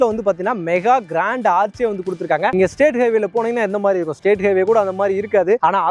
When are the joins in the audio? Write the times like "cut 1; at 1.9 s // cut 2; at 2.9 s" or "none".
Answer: cut 1; at 2.5 s